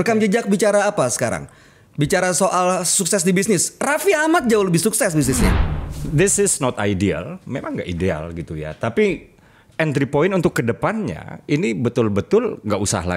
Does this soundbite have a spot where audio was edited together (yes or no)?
yes